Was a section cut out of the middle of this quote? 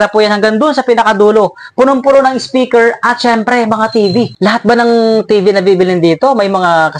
yes; 1 cut; at 4.3 s

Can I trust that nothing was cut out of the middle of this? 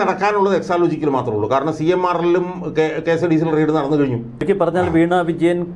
no; 1 cut; at 4.4 s

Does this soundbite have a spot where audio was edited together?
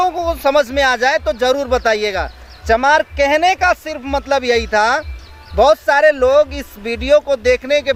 no; 0 cuts

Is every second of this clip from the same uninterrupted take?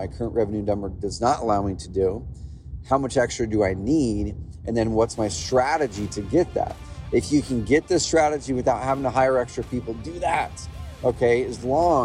yes; 0 cuts

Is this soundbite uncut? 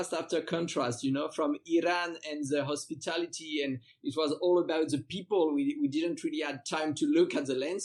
yes; 0 cuts

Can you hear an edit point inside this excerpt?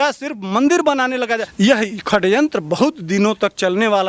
yes; 1 cut; at 1.4 s

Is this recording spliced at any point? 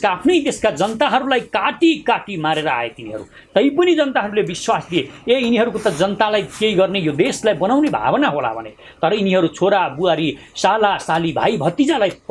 no; 0 cuts

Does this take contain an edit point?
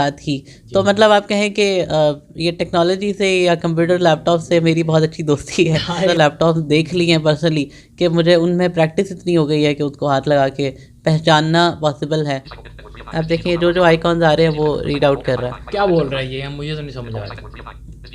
yes; 2 cuts; at 6.1 s, 12.5 s

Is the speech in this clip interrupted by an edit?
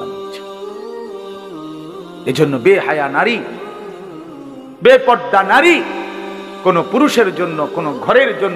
yes; 2 cuts; at 3.5 s, 4.8 s

